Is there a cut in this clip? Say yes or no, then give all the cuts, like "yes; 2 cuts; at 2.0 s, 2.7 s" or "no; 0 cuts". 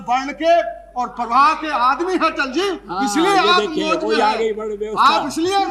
no; 0 cuts